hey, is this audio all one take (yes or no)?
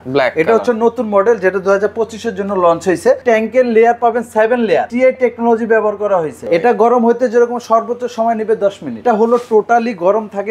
no